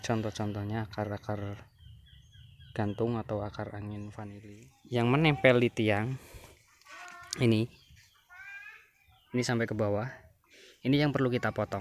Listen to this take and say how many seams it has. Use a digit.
1